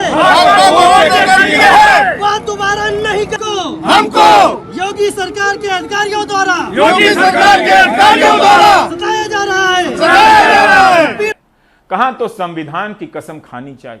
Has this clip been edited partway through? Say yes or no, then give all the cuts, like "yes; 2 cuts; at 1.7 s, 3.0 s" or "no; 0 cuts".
yes; 2 cuts; at 3.4 s, 11.3 s